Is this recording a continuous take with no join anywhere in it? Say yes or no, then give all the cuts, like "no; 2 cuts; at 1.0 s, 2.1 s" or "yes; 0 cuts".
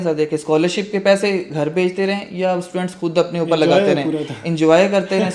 yes; 0 cuts